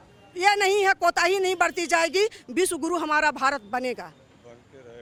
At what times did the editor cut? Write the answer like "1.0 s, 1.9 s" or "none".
none